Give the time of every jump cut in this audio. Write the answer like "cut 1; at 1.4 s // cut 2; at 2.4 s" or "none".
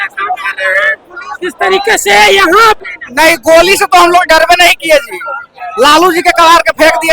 cut 1; at 2.8 s